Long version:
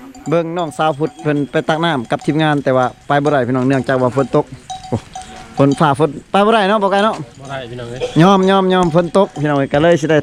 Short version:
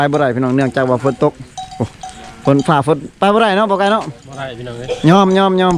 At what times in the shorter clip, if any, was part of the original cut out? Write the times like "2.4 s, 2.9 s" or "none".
none